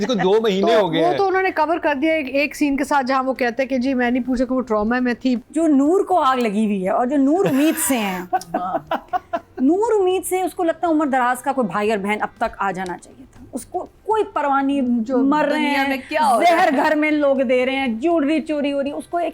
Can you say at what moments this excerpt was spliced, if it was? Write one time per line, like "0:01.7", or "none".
0:05.4